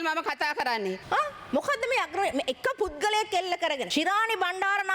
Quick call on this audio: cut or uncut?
cut